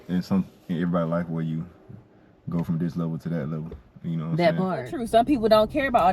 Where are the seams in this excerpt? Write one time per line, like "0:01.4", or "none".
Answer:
0:05.0